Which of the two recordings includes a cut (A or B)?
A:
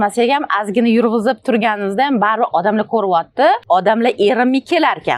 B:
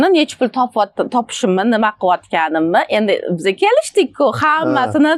A